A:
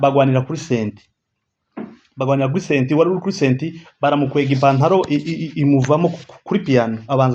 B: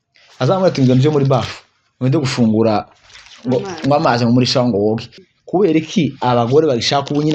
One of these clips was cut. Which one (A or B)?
B